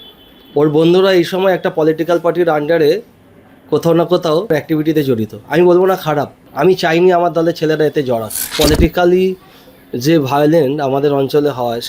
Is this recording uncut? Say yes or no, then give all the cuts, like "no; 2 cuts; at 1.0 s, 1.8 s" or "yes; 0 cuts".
no; 2 cuts; at 6.4 s, 8.6 s